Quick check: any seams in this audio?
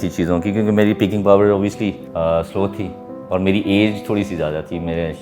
yes; 1 cut; at 2.0 s

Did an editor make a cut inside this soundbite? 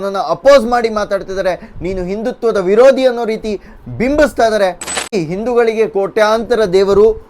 yes; 1 cut; at 5.1 s

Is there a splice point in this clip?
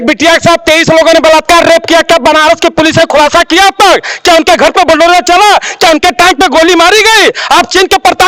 no; 0 cuts

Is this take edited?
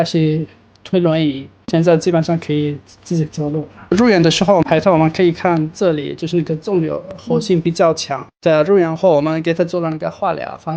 yes; 1 cut; at 1.6 s

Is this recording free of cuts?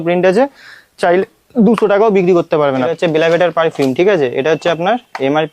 no; 1 cut; at 2.9 s

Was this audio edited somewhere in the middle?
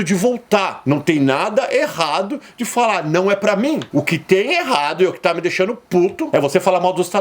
yes; 1 cut; at 6.2 s

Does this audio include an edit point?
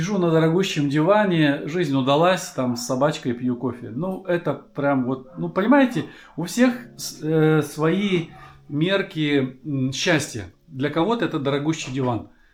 no; 0 cuts

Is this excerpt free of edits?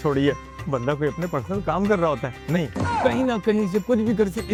yes; 0 cuts

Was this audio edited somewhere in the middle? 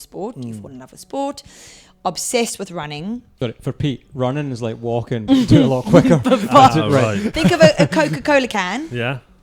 yes; 1 cut; at 3.3 s

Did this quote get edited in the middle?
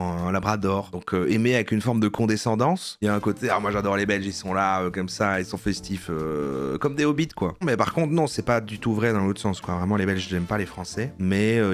yes; 1 cut; at 7.6 s

